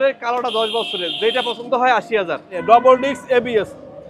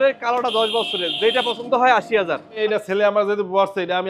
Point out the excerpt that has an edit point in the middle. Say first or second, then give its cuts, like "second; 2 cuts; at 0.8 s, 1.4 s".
second; 1 cut; at 2.5 s